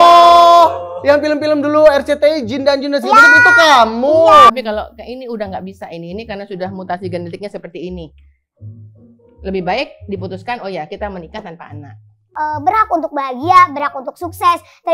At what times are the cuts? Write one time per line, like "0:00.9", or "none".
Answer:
0:04.5
0:12.2